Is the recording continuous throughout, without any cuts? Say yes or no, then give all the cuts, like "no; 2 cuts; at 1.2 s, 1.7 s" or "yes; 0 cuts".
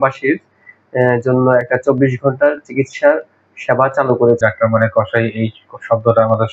no; 1 cut; at 4.4 s